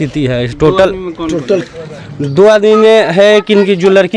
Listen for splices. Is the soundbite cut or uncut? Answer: uncut